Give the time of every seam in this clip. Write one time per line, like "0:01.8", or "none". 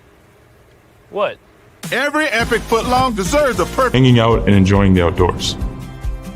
0:03.9